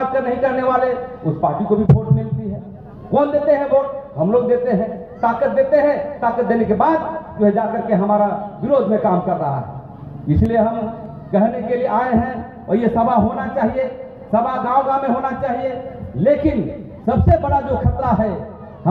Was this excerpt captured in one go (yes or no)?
yes